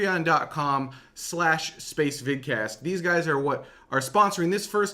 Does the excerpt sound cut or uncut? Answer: cut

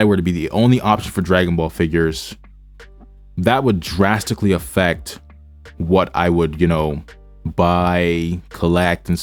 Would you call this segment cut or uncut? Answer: uncut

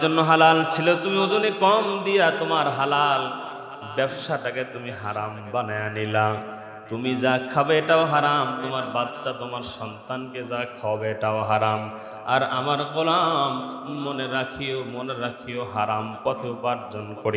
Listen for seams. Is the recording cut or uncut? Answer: uncut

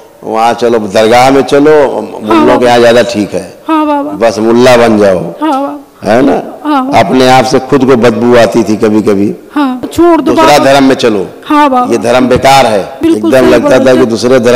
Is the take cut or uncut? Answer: cut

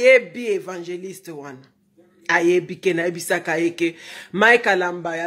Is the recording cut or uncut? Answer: uncut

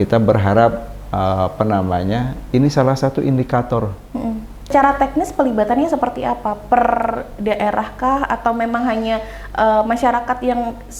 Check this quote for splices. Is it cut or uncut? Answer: cut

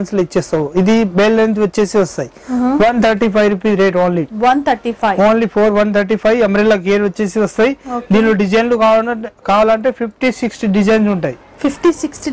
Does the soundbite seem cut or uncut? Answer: uncut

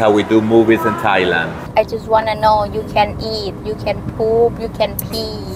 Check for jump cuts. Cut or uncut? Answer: cut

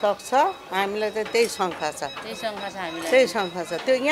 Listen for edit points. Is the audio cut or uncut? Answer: uncut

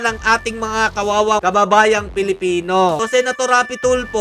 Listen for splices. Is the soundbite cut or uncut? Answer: cut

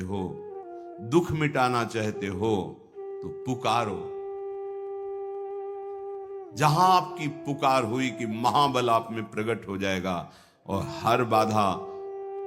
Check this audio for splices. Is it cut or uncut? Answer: uncut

